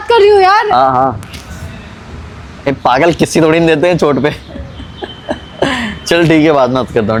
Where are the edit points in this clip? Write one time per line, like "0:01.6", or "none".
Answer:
none